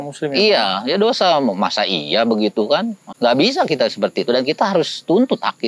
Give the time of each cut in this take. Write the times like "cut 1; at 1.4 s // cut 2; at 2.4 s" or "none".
cut 1; at 3.0 s